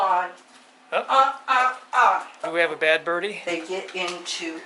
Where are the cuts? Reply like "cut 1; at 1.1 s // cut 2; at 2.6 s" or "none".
cut 1; at 2.5 s // cut 2; at 3.4 s